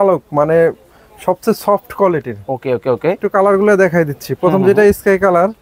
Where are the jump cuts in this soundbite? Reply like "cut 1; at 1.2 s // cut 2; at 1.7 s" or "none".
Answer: cut 1; at 3.2 s